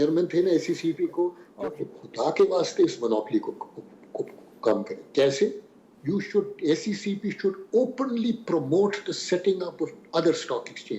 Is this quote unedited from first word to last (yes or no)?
no